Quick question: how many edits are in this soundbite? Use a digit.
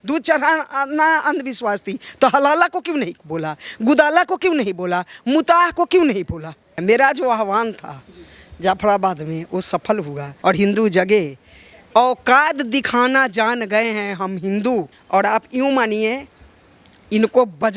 3